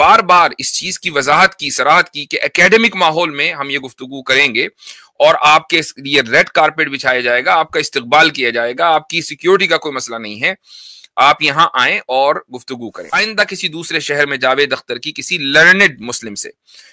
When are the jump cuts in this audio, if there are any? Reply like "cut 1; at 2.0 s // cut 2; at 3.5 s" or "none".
cut 1; at 13.1 s